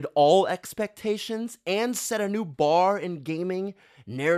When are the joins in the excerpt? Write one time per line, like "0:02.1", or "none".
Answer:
none